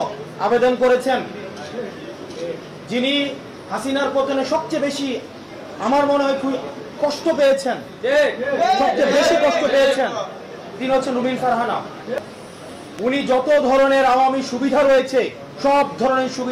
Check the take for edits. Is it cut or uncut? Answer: cut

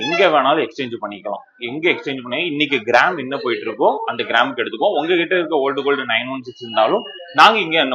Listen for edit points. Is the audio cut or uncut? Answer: uncut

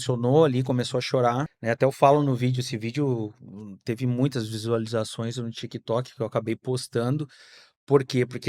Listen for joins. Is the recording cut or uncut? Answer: cut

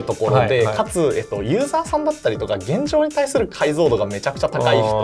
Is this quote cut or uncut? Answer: uncut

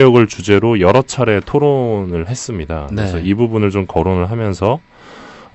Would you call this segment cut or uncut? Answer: uncut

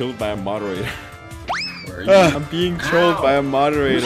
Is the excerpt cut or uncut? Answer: cut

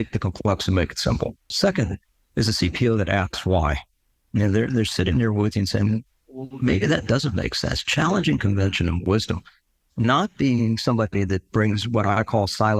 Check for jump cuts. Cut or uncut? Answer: cut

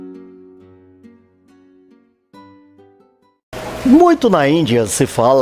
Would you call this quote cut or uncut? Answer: uncut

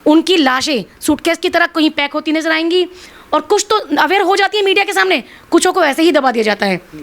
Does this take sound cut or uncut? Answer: uncut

